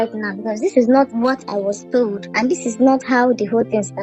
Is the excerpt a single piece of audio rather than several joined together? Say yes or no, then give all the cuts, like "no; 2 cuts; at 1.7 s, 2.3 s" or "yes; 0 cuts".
no; 2 cuts; at 1.1 s, 2.2 s